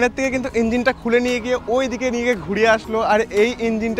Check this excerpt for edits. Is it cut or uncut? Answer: uncut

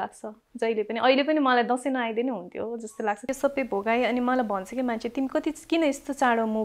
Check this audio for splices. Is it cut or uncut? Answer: cut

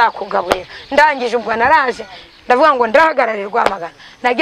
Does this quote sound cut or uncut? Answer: uncut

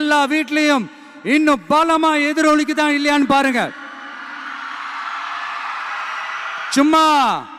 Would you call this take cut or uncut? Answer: uncut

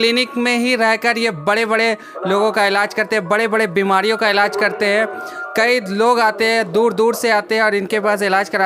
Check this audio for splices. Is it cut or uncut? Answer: uncut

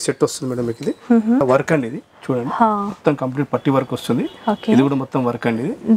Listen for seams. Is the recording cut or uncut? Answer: cut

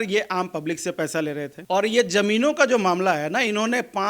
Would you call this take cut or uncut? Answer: cut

